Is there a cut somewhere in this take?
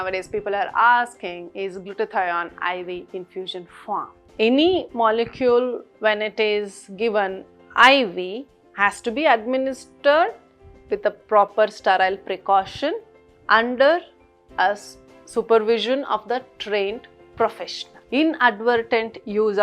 yes; 1 cut; at 4.2 s

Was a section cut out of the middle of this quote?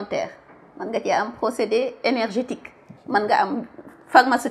no; 0 cuts

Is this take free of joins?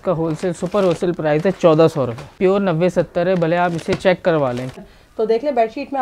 no; 2 cuts; at 2.3 s, 4.8 s

